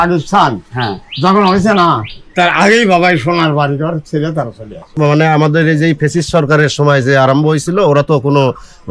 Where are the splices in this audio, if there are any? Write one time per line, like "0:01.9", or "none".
0:05.0